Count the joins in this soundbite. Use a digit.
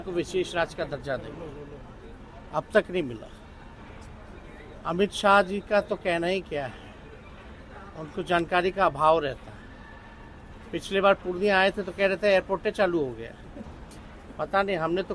0